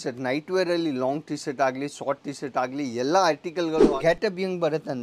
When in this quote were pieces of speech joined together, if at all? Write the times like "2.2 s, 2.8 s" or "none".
3.9 s